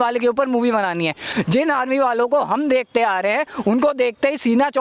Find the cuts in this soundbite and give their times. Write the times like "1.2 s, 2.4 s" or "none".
1.3 s